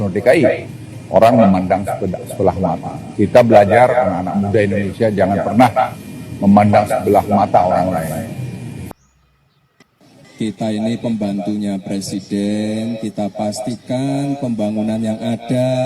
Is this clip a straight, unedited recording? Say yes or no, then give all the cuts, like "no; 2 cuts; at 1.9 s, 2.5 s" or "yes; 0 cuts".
no; 1 cut; at 8.8 s